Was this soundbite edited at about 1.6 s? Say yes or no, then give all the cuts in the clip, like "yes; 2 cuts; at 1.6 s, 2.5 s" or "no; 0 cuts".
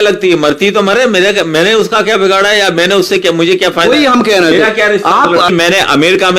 no; 1 cut; at 5.5 s